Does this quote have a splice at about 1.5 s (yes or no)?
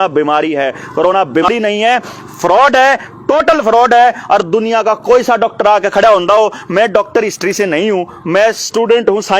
yes